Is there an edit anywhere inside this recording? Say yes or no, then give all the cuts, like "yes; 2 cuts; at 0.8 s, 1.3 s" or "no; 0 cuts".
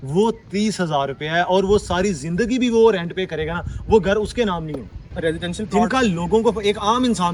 yes; 1 cut; at 5.0 s